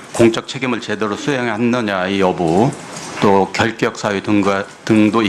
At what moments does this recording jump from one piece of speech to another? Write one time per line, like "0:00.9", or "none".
none